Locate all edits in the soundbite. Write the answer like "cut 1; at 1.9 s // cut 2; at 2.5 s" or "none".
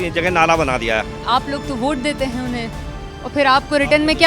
cut 1; at 1.2 s